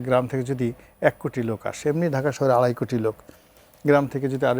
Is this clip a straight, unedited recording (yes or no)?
yes